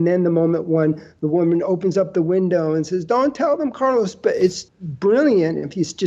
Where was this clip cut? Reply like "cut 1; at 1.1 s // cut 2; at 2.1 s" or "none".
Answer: cut 1; at 4.7 s